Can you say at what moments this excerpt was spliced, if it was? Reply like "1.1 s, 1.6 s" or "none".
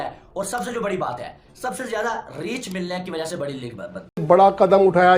4.2 s